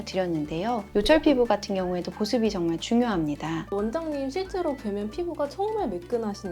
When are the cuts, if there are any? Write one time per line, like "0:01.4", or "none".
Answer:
0:03.6